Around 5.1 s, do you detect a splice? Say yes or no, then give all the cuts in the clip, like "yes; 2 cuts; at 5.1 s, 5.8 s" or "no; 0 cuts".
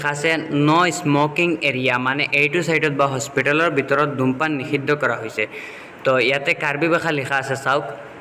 no; 0 cuts